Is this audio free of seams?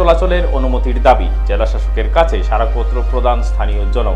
yes; 0 cuts

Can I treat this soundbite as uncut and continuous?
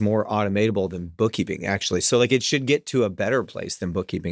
yes; 0 cuts

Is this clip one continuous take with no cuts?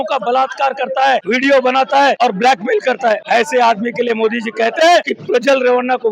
no; 4 cuts; at 1.2 s, 2.2 s, 3.2 s, 5.2 s

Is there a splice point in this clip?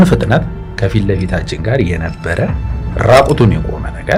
no; 0 cuts

